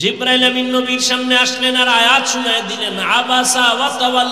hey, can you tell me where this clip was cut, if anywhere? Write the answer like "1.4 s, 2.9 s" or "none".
none